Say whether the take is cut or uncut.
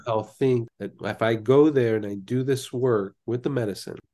uncut